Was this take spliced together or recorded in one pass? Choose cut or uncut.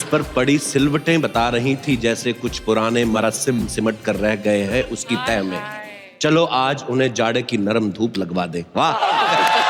uncut